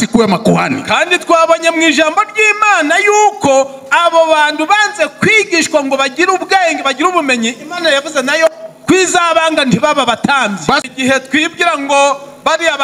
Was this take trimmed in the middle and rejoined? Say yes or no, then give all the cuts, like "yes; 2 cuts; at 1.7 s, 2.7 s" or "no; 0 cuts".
yes; 1 cut; at 10.8 s